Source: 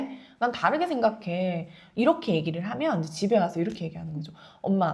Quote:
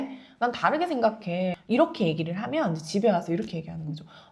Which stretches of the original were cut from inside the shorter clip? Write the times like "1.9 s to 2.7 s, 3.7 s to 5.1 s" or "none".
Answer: 1.6 s to 1.9 s